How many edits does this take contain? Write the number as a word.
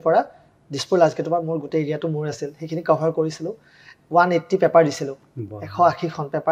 zero